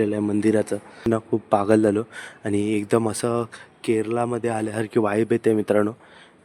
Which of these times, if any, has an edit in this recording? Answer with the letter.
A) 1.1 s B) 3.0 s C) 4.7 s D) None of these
A